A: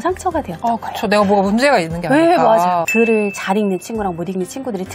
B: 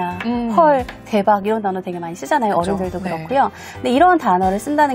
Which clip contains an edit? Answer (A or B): A